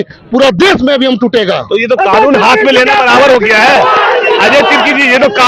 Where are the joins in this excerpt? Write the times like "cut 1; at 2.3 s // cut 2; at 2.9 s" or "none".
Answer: none